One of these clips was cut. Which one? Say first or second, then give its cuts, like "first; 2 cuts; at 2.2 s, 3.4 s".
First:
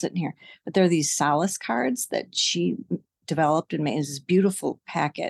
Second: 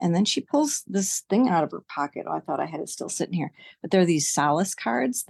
first; 1 cut; at 3.1 s